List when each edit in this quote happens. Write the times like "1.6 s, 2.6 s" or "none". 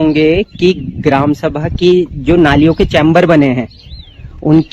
none